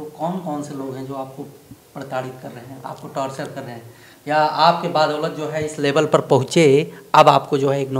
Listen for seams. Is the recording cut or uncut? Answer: uncut